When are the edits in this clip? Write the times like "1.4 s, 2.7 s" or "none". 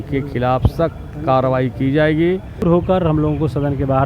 2.6 s